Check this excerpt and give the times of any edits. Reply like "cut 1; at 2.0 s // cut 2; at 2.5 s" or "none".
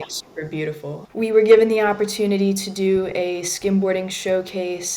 cut 1; at 1.0 s